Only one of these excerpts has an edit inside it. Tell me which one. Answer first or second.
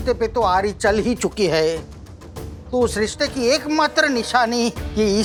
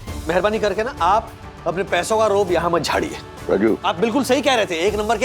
second